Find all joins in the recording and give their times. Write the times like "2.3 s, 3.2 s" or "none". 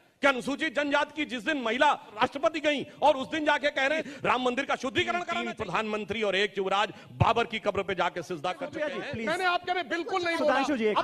4.1 s, 5.4 s, 8.7 s